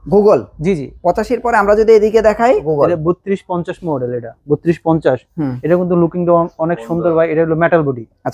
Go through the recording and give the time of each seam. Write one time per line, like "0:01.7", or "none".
0:02.7